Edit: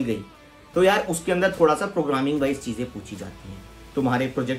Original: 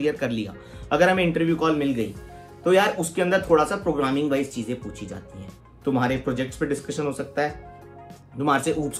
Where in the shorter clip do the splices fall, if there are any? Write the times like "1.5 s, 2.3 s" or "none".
none